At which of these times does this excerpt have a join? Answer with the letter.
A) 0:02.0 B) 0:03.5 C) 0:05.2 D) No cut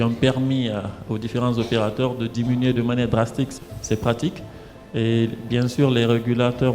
B